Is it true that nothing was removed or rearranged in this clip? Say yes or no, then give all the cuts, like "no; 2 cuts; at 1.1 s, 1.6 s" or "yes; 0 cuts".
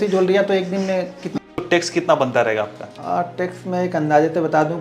no; 2 cuts; at 1.4 s, 2.9 s